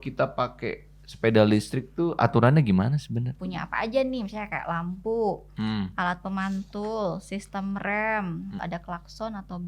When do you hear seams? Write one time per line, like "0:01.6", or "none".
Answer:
0:03.4
0:08.6